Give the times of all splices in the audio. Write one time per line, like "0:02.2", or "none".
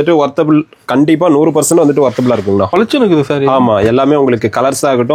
0:02.7